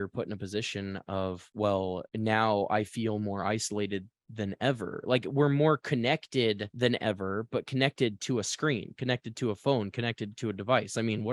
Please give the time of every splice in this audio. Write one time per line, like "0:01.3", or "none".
none